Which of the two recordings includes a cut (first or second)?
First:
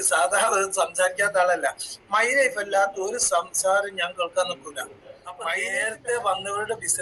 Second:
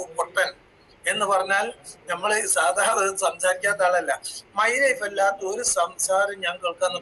first